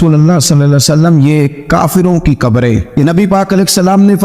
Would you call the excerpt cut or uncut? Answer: cut